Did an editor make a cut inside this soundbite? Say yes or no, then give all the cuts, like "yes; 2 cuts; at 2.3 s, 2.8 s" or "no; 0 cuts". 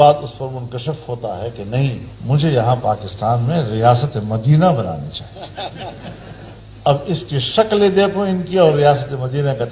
yes; 2 cuts; at 2.1 s, 6.6 s